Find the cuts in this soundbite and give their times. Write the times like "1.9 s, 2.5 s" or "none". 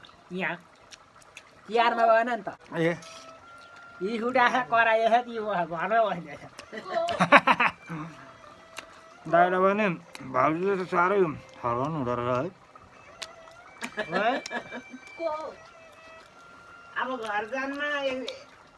2.6 s